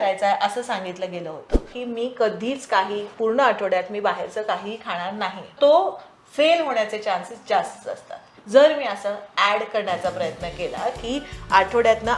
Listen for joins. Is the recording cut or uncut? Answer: cut